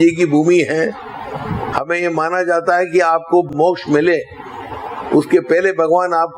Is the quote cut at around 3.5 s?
yes; 2 cuts; at 1.7 s, 3.5 s

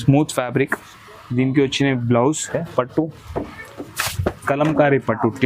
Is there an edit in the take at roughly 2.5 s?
yes; 1 cut; at 2.5 s

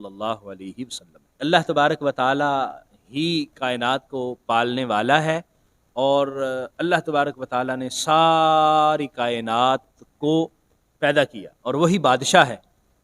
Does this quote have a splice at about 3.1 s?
no; 1 cut; at 1.4 s

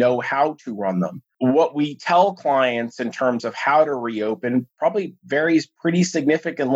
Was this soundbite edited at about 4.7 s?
no; 1 cut; at 1.2 s

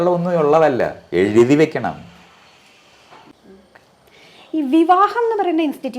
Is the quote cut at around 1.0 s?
no; 1 cut; at 3.3 s

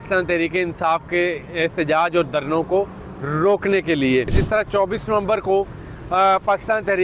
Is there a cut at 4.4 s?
yes; 1 cut; at 4.4 s

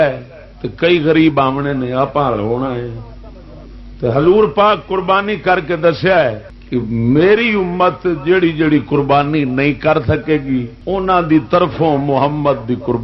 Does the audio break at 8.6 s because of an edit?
no; 1 cut; at 10.8 s

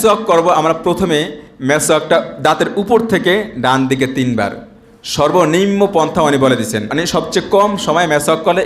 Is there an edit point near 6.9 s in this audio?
yes; 1 cut; at 6.9 s

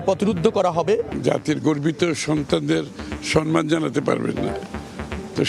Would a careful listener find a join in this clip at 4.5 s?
no; 1 cut; at 1.2 s

